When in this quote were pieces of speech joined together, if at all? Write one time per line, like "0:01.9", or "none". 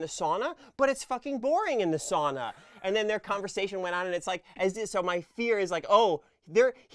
none